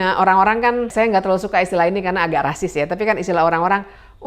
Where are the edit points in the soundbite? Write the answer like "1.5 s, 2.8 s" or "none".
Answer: 0.9 s